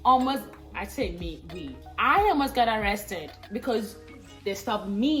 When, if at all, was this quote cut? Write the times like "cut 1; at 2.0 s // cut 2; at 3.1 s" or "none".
none